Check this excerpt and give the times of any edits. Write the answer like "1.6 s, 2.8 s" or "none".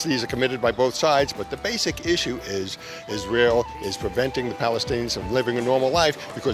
none